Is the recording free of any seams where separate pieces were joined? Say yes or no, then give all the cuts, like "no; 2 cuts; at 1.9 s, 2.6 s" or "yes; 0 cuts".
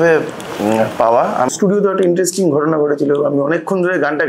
no; 1 cut; at 1.5 s